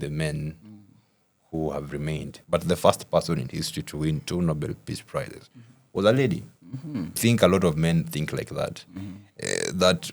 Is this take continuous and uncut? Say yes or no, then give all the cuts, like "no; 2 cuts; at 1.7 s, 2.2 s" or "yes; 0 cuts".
no; 2 cuts; at 2.3 s, 7.2 s